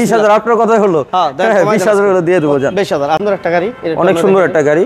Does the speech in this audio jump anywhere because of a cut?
yes; 1 cut; at 3.2 s

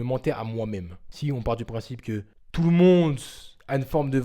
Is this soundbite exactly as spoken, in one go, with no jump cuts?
no; 1 cut; at 1.0 s

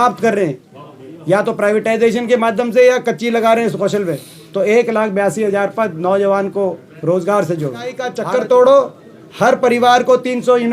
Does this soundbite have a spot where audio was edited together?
yes; 1 cut; at 8.1 s

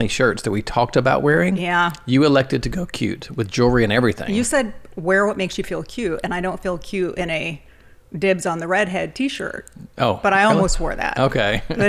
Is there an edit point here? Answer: no; 0 cuts

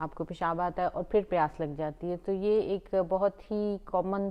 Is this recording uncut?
yes; 0 cuts

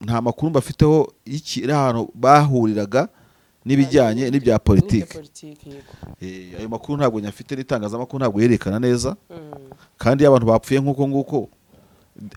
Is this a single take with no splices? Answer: yes; 0 cuts

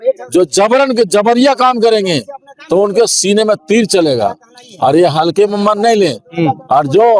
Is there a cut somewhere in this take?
no; 0 cuts

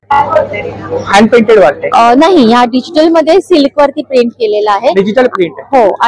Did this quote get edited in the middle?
no; 0 cuts

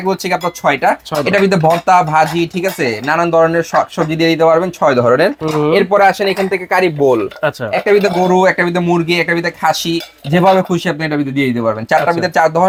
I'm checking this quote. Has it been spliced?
no; 0 cuts

